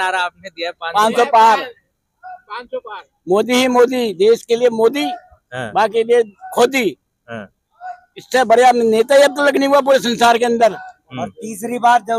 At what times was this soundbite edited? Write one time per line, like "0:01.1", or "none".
none